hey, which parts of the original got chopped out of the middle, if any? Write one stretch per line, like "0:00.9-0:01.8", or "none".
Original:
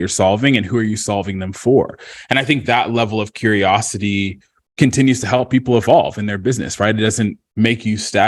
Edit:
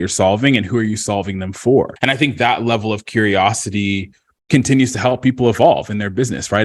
0:01.9-0:02.2